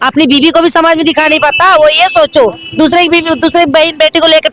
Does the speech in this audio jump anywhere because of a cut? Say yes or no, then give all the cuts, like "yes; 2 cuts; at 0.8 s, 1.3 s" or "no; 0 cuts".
no; 0 cuts